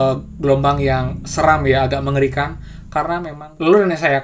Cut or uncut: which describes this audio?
cut